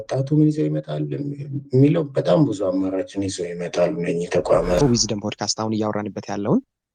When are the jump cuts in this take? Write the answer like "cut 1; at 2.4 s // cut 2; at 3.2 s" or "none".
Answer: cut 1; at 4.8 s